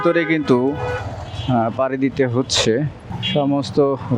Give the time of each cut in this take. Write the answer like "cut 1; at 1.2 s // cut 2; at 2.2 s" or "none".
none